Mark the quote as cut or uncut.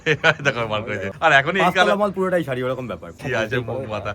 cut